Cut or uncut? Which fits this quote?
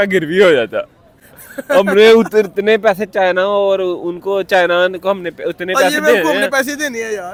uncut